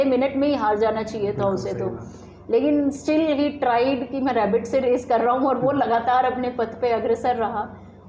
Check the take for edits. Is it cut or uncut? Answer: uncut